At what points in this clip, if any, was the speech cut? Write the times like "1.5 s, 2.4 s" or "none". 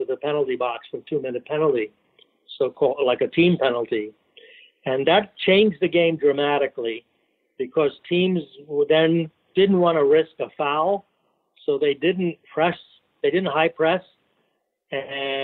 9.4 s